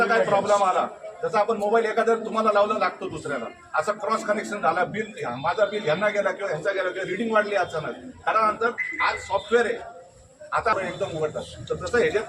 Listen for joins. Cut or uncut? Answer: cut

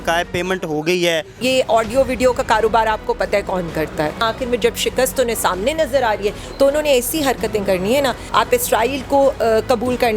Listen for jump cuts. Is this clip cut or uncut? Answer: cut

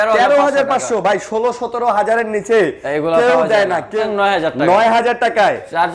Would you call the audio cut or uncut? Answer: cut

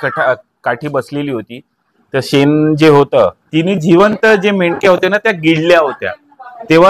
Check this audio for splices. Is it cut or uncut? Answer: cut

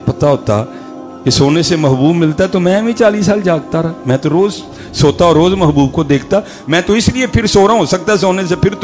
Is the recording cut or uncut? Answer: uncut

